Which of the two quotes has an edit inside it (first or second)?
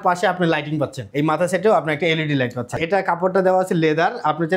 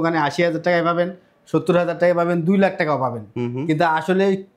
first